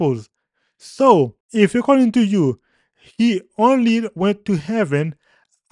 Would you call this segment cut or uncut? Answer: cut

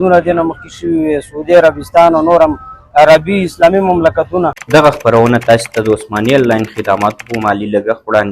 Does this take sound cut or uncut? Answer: cut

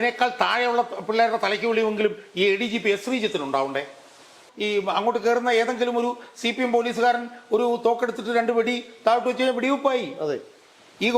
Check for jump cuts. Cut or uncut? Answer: cut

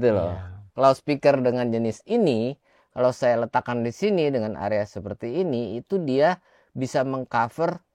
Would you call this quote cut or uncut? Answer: uncut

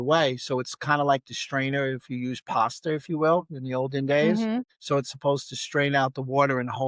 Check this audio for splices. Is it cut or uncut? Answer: cut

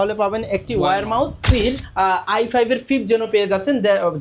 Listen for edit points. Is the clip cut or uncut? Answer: cut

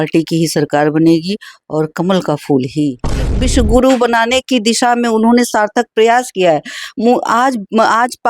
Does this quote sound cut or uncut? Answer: cut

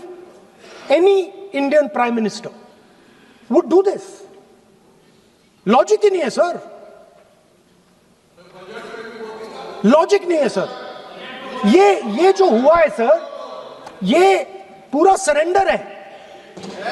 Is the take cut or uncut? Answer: uncut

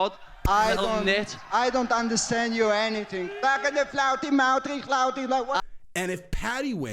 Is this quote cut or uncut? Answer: cut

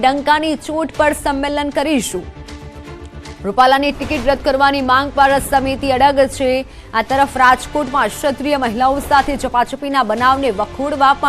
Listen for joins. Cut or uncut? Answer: cut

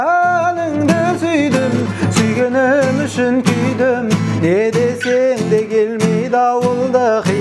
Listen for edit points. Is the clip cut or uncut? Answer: uncut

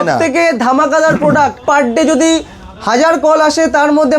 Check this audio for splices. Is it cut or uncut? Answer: cut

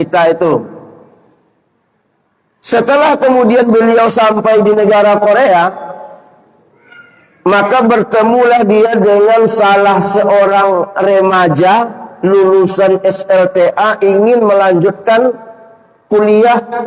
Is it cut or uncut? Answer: uncut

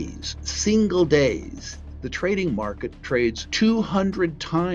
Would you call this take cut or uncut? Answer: cut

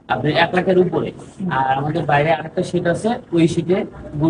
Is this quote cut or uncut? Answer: uncut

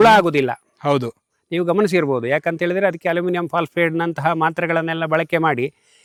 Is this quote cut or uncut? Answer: uncut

